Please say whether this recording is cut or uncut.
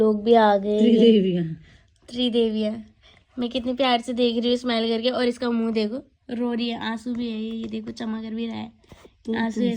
uncut